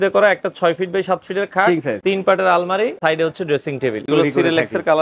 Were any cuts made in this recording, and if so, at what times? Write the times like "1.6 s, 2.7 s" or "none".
2.0 s, 3.0 s, 4.1 s